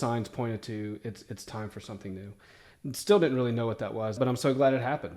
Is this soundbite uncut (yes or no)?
no